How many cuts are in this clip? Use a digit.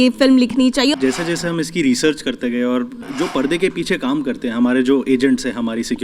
2